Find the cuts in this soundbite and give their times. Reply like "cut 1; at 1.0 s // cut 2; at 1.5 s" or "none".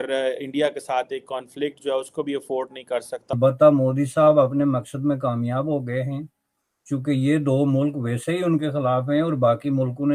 cut 1; at 3.2 s

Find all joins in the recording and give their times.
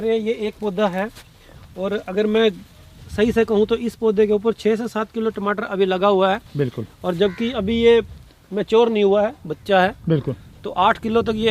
none

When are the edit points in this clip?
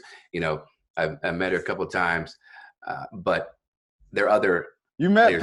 none

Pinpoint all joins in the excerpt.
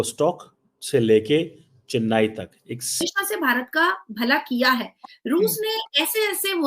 cut 1; at 3.0 s

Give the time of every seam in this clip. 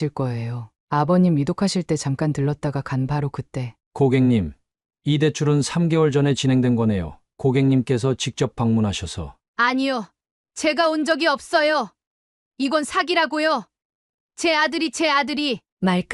cut 1; at 3.8 s

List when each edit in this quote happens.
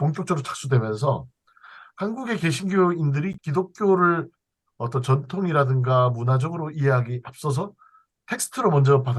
cut 1; at 3.4 s

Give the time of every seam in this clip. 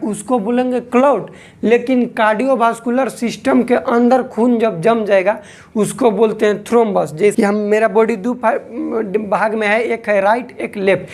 cut 1; at 7.3 s

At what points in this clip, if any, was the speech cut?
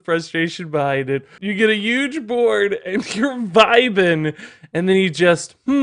cut 1; at 1.3 s

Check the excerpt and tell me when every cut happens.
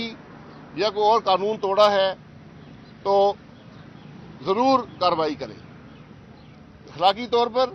none

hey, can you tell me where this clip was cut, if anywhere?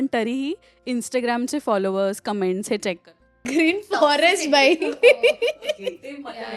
cut 1; at 3.4 s

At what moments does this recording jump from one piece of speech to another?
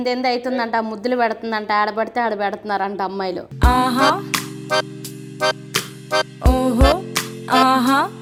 none

